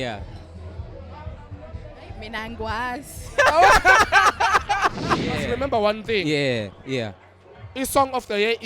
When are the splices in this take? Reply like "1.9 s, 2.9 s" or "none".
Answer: 5.4 s